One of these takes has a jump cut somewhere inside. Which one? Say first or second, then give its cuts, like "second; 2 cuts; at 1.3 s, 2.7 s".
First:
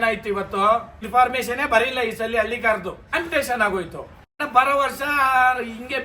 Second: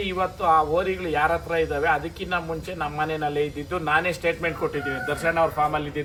first; 3 cuts; at 1.0 s, 3.1 s, 4.5 s